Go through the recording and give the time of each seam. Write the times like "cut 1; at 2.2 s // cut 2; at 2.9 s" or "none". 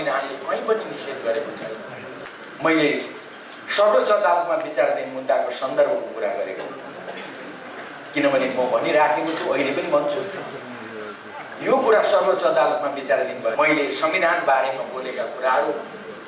cut 1; at 2.2 s // cut 2; at 13.5 s

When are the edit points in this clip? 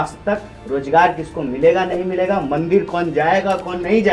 none

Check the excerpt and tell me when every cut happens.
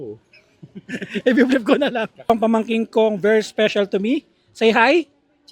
cut 1; at 2.3 s

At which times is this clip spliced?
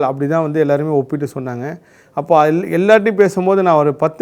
none

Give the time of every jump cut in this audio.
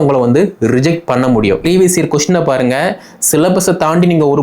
cut 1; at 1.6 s

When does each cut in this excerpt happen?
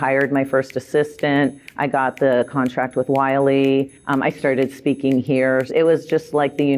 cut 1; at 5.7 s

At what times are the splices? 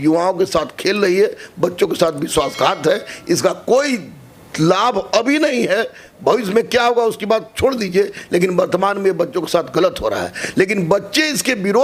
none

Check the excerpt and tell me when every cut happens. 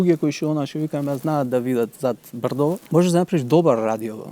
cut 1; at 2.8 s

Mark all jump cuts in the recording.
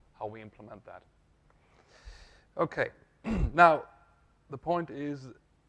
none

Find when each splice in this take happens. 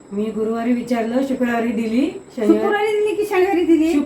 none

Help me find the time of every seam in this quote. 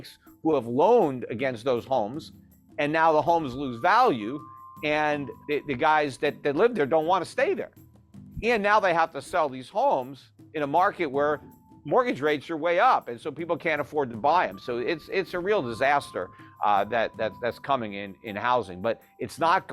cut 1; at 5.3 s

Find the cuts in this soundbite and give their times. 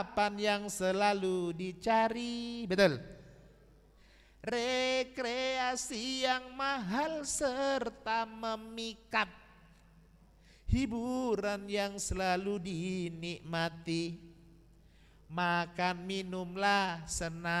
none

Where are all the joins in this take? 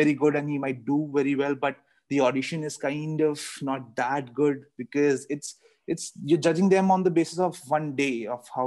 none

